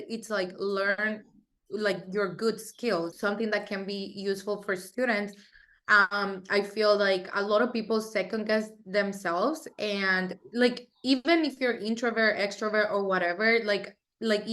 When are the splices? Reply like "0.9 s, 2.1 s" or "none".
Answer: 3.1 s

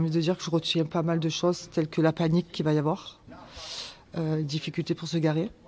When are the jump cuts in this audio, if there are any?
none

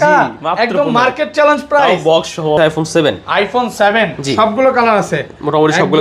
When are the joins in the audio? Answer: 2.6 s

